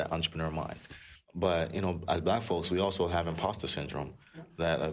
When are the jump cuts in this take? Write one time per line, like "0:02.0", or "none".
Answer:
0:01.2